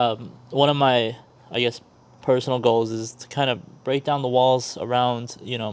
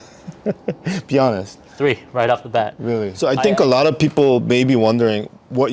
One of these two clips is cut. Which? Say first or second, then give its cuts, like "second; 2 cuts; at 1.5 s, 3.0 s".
second; 1 cut; at 3.2 s